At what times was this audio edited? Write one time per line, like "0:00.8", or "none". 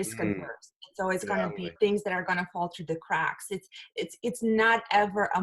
0:01.7